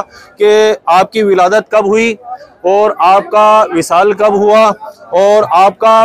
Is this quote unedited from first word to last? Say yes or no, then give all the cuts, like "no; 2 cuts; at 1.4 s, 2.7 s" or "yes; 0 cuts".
yes; 0 cuts